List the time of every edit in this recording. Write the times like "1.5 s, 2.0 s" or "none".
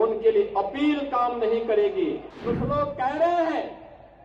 2.3 s